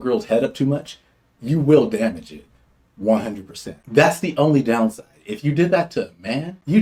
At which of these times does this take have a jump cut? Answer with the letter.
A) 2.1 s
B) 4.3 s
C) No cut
C